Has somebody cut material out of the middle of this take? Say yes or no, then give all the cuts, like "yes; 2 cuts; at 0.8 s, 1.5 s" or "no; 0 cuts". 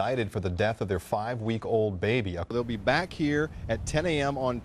yes; 1 cut; at 2.5 s